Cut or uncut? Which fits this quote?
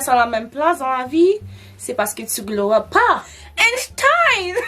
cut